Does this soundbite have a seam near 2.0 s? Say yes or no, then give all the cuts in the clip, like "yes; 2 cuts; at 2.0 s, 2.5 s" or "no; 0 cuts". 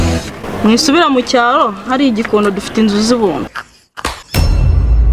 no; 1 cut; at 4.2 s